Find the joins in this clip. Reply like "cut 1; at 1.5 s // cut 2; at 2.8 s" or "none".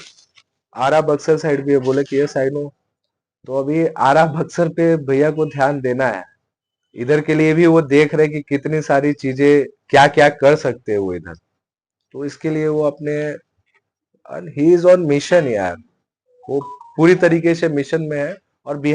none